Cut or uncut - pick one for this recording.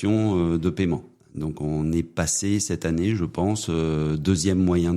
cut